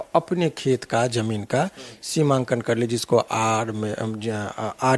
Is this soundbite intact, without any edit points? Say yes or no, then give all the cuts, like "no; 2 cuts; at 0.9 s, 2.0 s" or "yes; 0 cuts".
yes; 0 cuts